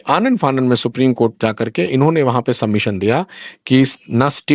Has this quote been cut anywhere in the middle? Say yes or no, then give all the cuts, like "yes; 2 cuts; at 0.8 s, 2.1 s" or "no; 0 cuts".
no; 0 cuts